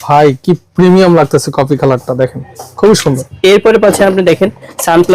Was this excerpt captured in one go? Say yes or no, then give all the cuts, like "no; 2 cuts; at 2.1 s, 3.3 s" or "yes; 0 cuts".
no; 1 cut; at 3.3 s